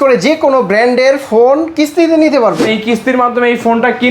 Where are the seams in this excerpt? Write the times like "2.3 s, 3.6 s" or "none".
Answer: 2.6 s

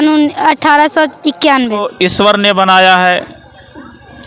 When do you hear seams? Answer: 1.9 s

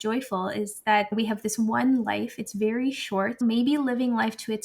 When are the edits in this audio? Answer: 1.1 s, 3.3 s

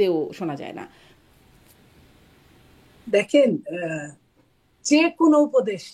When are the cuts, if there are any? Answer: none

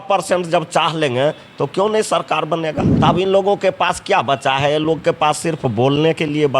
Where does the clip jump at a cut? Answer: 2.9 s

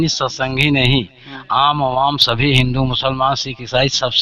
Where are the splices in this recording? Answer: none

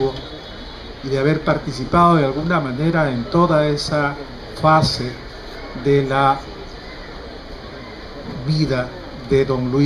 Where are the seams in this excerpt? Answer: 3.2 s

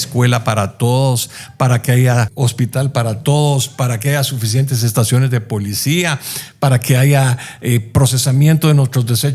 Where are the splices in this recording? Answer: 2.3 s

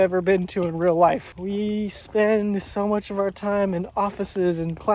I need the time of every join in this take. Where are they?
1.3 s

